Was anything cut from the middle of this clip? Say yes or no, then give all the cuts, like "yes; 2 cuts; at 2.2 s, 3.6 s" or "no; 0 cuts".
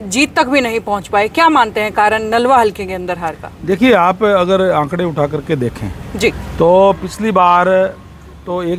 no; 0 cuts